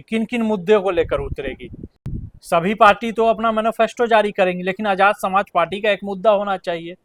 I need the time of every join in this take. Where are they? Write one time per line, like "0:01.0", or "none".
none